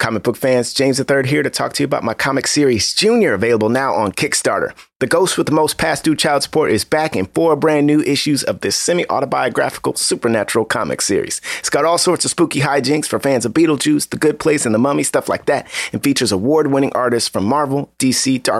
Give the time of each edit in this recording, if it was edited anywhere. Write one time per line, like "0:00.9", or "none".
none